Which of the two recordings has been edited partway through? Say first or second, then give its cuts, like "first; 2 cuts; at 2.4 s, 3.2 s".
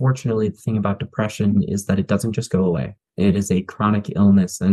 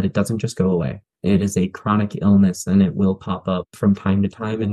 second; 1 cut; at 3.7 s